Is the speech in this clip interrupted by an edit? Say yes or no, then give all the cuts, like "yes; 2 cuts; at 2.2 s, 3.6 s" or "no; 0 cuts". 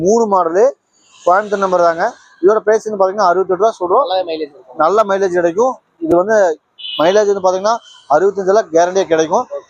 no; 0 cuts